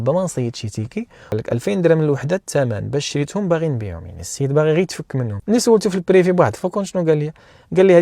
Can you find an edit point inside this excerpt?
yes; 1 cut; at 1.3 s

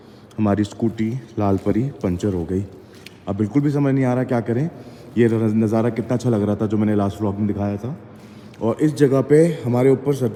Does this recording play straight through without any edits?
yes; 0 cuts

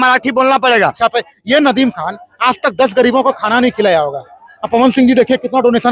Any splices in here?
yes; 1 cut; at 1.1 s

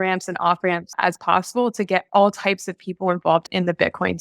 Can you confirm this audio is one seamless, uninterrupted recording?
no; 2 cuts; at 0.9 s, 3.5 s

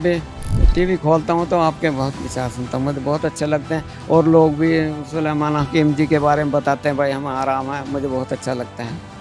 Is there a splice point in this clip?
no; 0 cuts

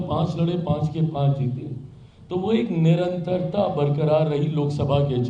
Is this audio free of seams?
yes; 0 cuts

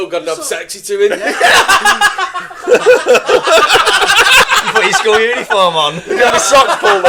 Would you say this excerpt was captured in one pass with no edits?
yes; 0 cuts

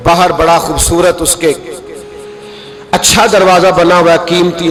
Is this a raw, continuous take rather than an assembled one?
yes; 0 cuts

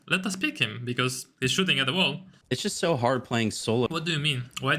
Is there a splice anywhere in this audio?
yes; 2 cuts; at 2.3 s, 3.9 s

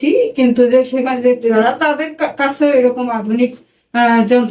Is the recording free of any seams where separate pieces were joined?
no; 1 cut; at 1.5 s

